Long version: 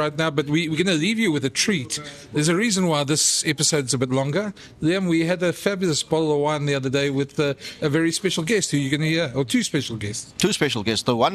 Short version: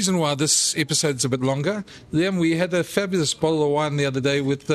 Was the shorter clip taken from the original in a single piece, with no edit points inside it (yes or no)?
yes